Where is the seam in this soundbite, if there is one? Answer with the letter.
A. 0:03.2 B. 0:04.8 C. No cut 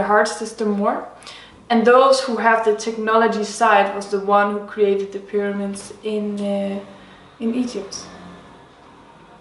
A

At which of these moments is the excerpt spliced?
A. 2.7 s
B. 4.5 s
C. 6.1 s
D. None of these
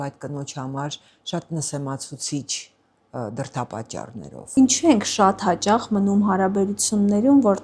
B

